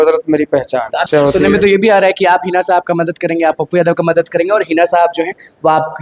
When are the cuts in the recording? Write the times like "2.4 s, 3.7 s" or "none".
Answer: 1.0 s